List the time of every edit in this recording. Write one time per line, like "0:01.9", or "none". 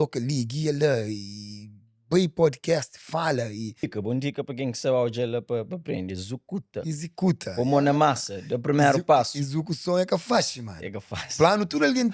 0:03.8